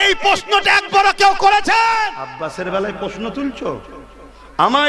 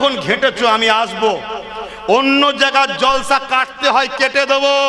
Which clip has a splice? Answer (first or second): first